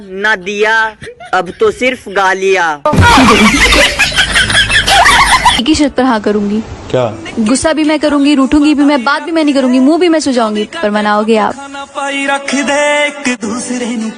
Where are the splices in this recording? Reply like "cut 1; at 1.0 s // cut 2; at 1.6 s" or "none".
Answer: cut 1; at 5.6 s